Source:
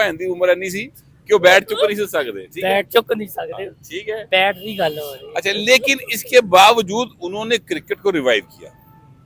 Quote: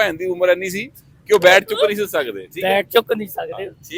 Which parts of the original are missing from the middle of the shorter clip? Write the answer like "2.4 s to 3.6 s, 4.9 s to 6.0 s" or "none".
none